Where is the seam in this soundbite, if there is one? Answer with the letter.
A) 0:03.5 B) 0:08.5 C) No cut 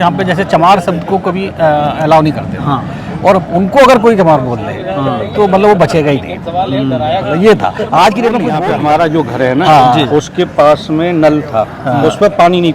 B